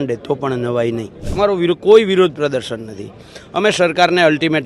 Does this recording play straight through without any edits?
no; 1 cut; at 1.2 s

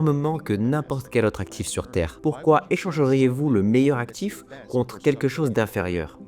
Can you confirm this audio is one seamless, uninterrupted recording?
no; 1 cut; at 2.1 s

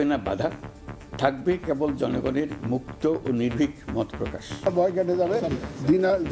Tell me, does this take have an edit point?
yes; 1 cut; at 4.6 s

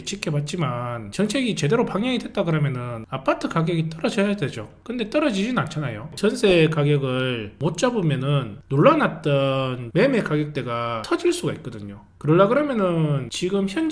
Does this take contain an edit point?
yes; 1 cut; at 6.1 s

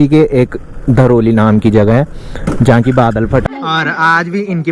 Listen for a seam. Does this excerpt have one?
yes; 1 cut; at 3.4 s

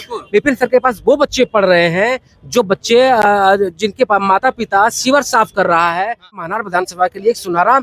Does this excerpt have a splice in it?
yes; 1 cut; at 6.4 s

